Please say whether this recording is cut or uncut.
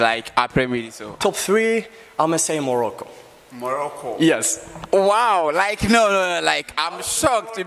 cut